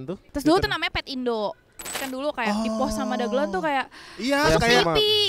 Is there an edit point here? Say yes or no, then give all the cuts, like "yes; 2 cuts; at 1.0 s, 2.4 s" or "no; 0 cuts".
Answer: yes; 1 cut; at 2.0 s